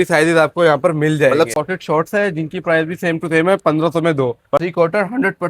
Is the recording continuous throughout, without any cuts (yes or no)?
no